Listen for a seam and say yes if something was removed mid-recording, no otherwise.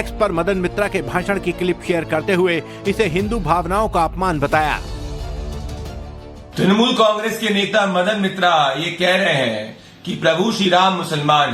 no